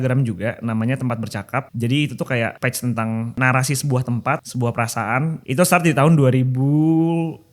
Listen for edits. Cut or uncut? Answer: cut